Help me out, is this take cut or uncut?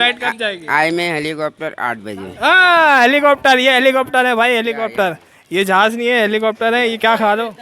cut